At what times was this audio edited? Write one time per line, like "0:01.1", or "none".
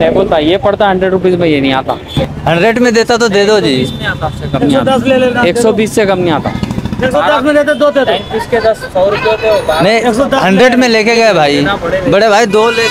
0:02.2